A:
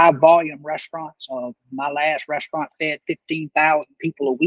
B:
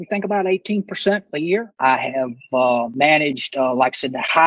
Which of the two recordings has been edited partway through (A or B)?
B